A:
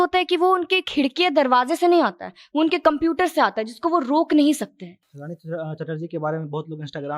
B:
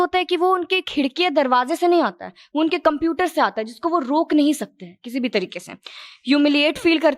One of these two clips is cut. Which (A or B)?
A